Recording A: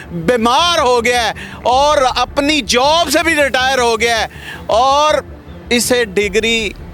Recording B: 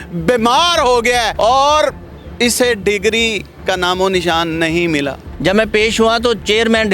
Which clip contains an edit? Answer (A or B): B